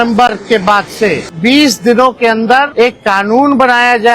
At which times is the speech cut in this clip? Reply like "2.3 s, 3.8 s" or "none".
1.3 s, 2.7 s